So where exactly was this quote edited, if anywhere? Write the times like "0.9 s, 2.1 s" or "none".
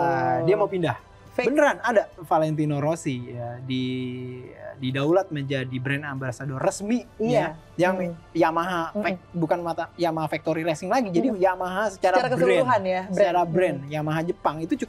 2.2 s